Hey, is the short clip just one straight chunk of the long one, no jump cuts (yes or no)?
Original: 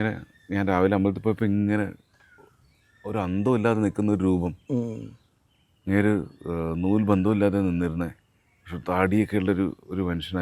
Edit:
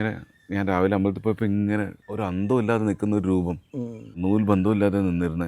no